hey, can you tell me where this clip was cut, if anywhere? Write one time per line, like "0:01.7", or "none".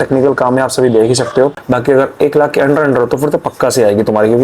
0:01.6